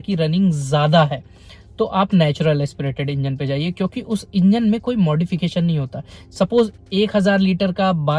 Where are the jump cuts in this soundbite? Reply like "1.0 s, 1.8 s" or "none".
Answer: none